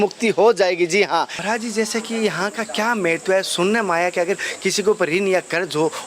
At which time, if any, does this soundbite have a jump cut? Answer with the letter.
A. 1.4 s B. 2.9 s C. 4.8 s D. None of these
A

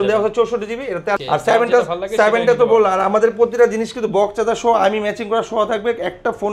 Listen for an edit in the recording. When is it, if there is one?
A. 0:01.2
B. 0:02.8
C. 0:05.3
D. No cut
A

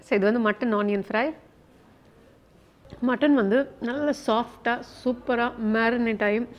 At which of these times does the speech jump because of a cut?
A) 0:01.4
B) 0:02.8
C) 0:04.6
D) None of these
B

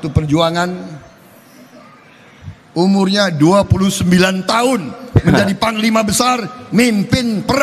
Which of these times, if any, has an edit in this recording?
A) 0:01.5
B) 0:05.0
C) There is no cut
C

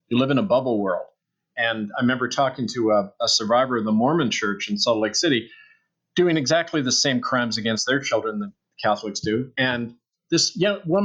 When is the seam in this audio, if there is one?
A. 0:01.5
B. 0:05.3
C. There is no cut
A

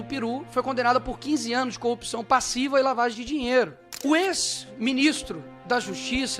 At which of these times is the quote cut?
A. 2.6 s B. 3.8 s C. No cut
B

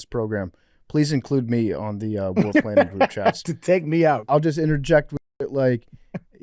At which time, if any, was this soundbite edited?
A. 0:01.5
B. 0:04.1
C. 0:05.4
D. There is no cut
B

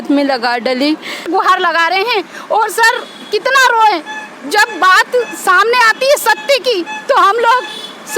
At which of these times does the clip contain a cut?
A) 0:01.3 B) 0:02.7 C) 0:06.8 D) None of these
A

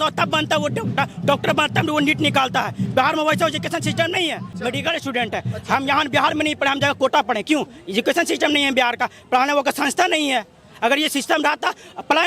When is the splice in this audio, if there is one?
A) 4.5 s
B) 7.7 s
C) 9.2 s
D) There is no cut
A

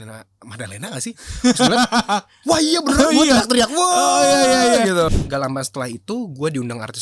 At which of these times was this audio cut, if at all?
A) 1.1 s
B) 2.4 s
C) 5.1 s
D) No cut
C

